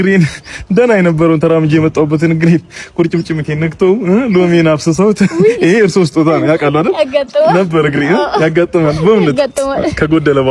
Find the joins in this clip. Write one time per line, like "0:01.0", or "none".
0:08.7